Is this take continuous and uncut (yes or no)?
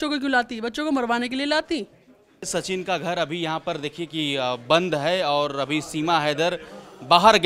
no